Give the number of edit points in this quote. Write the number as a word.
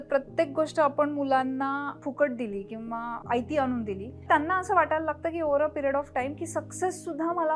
three